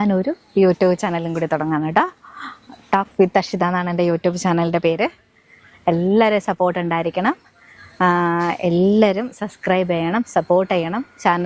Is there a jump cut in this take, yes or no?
no